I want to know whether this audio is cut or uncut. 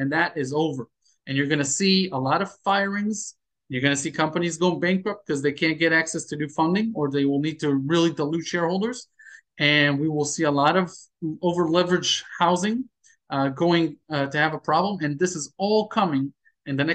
uncut